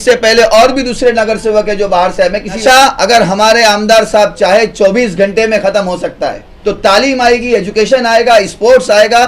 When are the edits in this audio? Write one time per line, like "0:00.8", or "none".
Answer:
0:02.6
0:06.5